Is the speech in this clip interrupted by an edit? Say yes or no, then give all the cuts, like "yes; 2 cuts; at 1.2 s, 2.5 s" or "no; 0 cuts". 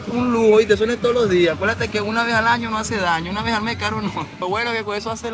yes; 1 cut; at 4.4 s